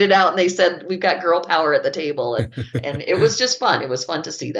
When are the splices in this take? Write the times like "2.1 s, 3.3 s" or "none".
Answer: none